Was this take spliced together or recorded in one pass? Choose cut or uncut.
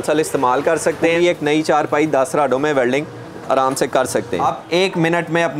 cut